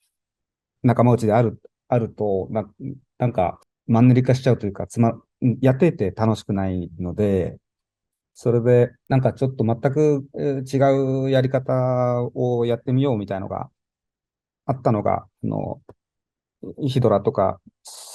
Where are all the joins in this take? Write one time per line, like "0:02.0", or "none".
0:03.7
0:09.0

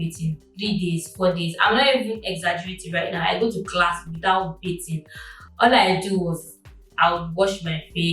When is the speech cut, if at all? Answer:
none

